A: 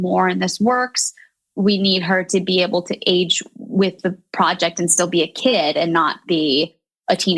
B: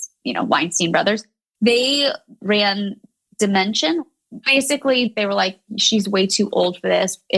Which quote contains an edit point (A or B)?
B